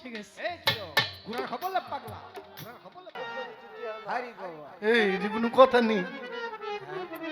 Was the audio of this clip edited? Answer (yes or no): yes